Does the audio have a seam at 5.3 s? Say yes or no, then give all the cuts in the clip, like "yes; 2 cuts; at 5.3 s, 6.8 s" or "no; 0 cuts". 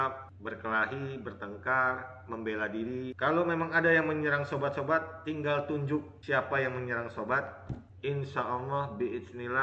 no; 1 cut; at 3.1 s